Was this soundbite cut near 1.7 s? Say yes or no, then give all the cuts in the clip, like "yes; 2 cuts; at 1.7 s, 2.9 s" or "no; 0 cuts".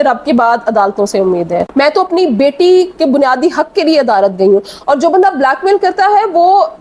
yes; 1 cut; at 1.7 s